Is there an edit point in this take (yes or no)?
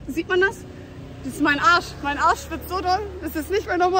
no